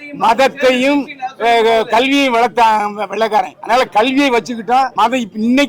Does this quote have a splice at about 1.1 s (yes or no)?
no